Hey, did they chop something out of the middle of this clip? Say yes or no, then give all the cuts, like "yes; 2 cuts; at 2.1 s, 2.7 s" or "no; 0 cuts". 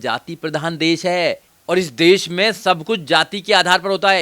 yes; 1 cut; at 1.5 s